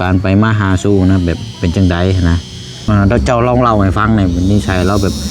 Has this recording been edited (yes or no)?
yes